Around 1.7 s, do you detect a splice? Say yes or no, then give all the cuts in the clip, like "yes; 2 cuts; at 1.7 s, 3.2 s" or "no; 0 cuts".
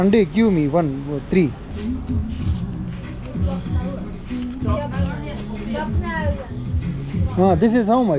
yes; 1 cut; at 1.7 s